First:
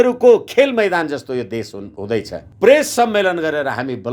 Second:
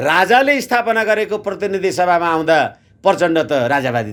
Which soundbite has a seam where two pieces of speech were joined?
first; 1 cut; at 2.4 s

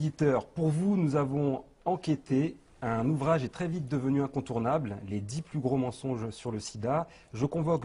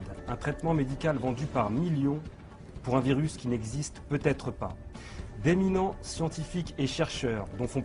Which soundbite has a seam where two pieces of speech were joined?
second; 1 cut; at 1.6 s

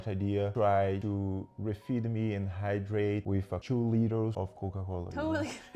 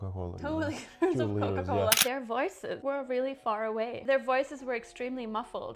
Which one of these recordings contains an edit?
second; 1 cut; at 2.0 s

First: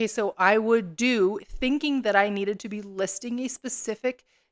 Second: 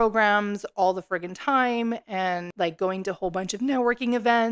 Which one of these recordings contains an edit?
second; 1 cut; at 2.5 s

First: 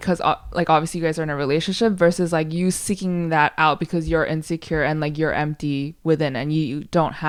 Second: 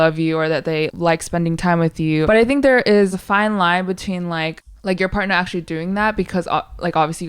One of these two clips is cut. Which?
second; 4 cuts; at 0.9 s, 2.2 s, 3.2 s, 4.6 s

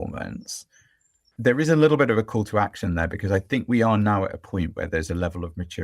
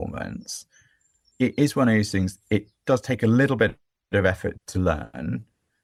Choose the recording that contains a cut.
first; 1 cut; at 1.3 s

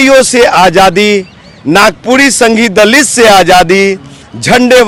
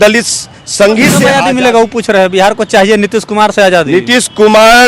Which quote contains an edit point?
second; 1 cut; at 1.3 s

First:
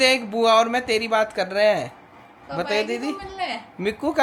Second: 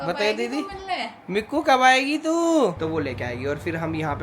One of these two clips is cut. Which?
second; 1 cut; at 2.8 s

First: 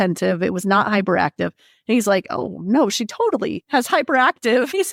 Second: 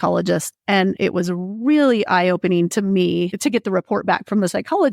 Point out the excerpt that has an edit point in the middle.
second; 1 cut; at 1.0 s

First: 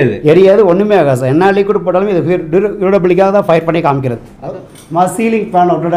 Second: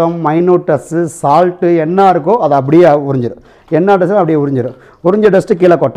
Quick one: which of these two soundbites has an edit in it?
first; 1 cut; at 4.5 s

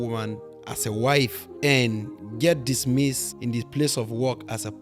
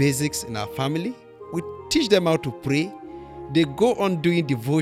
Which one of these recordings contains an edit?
first; 2 cuts; at 1.4 s, 3.3 s

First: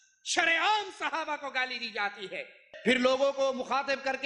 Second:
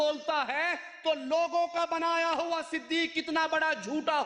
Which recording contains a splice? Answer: first; 1 cut; at 2.6 s

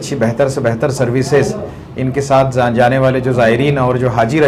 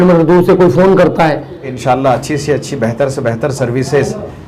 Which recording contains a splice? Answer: second; 1 cut; at 1.7 s

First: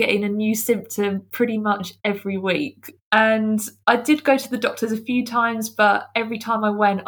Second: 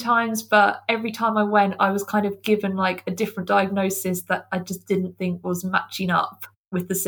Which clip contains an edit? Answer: first; 1 cut; at 2.9 s

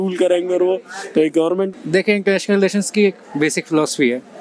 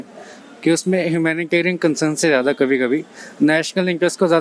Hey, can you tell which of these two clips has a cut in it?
first; 1 cut; at 1.7 s

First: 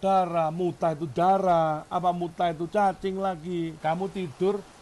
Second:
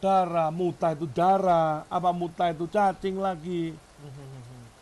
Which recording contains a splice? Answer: first; 1 cut; at 3.8 s

